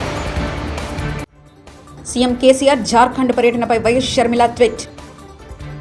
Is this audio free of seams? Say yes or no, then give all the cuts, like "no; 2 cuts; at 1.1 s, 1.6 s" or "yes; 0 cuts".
yes; 0 cuts